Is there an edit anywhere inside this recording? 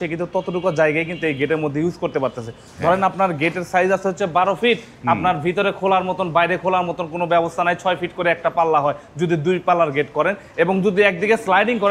no; 0 cuts

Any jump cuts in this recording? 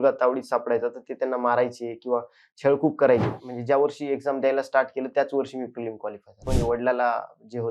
yes; 2 cuts; at 3.4 s, 6.5 s

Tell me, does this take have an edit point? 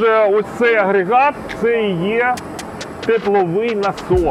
no; 0 cuts

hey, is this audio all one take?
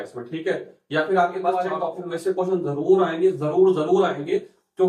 no; 1 cut; at 1.7 s

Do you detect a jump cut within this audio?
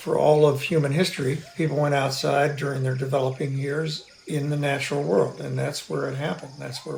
no; 0 cuts

